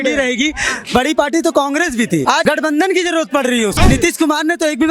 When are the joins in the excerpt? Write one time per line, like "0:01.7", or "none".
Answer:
0:02.3
0:03.8